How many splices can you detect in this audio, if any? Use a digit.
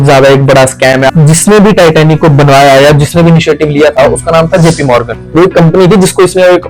2